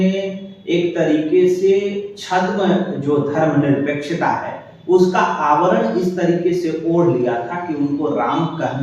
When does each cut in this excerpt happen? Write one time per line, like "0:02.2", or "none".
none